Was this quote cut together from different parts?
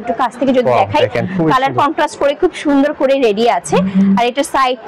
no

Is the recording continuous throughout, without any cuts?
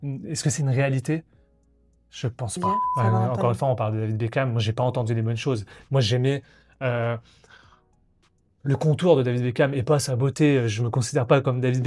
no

